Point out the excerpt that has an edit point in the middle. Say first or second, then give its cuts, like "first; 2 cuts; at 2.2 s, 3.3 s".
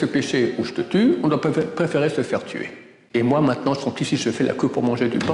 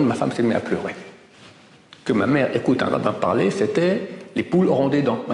first; 1 cut; at 3.1 s